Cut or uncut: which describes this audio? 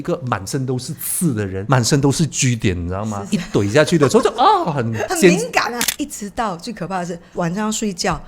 cut